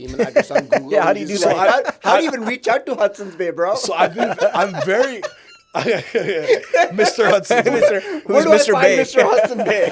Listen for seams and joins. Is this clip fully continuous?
yes; 0 cuts

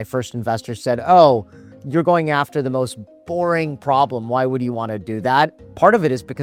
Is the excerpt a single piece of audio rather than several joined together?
yes; 0 cuts

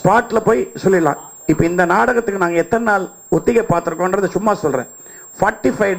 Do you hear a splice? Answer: no; 0 cuts

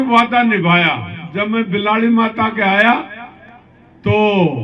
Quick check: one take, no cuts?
yes; 0 cuts

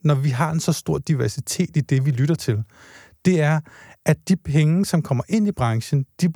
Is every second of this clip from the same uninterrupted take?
yes; 0 cuts

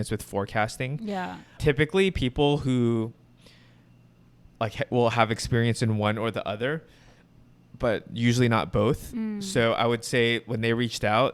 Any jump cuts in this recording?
no; 0 cuts

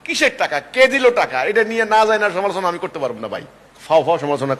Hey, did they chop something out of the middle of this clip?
no; 0 cuts

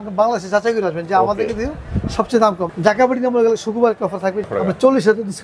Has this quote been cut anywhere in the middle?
yes; 2 cuts; at 2.6 s, 4.5 s

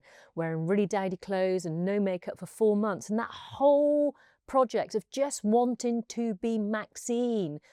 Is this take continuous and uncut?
yes; 0 cuts

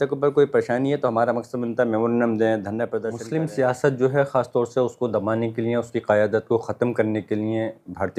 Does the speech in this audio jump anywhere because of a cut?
yes; 1 cut; at 3.1 s

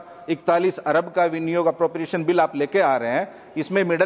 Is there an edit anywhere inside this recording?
no; 0 cuts

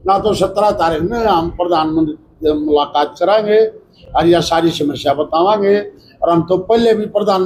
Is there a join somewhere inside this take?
no; 0 cuts

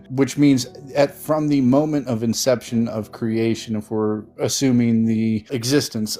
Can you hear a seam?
no; 0 cuts

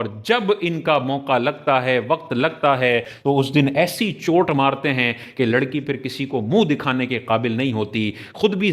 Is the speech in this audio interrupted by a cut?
yes; 1 cut; at 3.1 s

